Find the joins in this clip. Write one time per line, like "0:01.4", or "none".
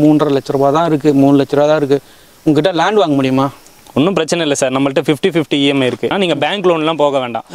0:06.1